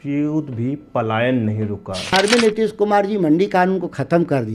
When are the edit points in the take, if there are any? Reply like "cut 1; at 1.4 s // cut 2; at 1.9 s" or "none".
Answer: cut 1; at 2.1 s